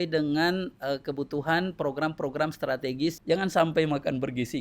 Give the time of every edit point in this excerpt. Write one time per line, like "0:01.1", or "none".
0:03.2